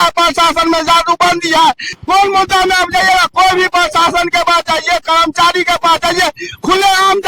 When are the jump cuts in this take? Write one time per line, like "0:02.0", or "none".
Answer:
0:01.8

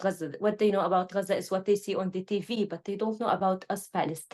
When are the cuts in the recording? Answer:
none

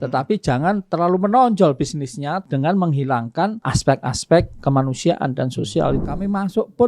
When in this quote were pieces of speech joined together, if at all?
0:02.4
0:03.7
0:06.0

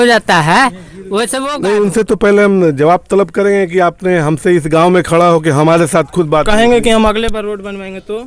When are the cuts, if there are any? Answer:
0:01.4

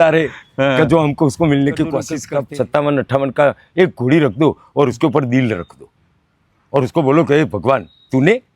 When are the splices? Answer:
0:02.2

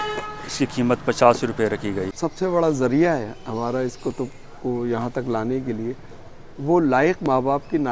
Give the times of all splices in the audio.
0:02.1

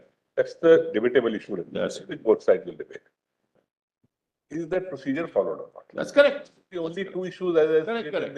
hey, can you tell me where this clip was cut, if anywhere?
0:03.5

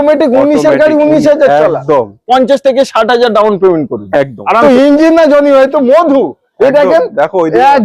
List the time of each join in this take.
0:04.6

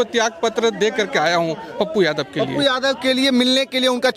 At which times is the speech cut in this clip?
none

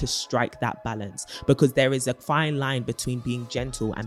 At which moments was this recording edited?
none

